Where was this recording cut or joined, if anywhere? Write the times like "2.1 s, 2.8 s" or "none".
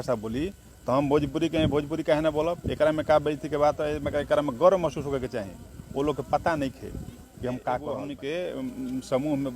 8.1 s